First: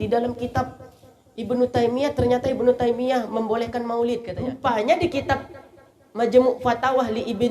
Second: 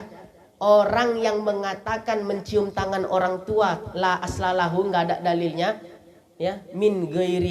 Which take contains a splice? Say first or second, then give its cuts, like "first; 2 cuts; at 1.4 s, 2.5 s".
first; 1 cut; at 4.3 s